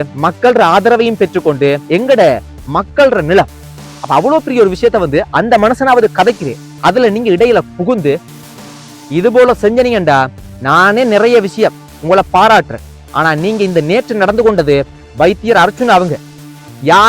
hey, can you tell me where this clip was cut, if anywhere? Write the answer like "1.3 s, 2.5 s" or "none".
1.8 s